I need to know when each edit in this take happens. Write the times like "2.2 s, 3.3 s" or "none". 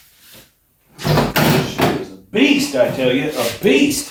none